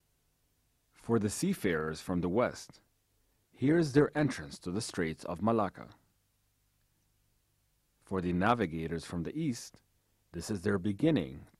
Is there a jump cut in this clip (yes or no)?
no